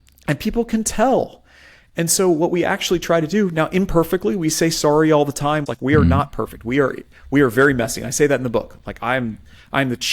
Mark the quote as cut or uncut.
cut